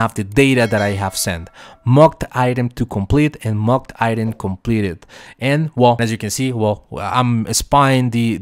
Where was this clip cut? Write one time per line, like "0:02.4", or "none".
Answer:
0:06.0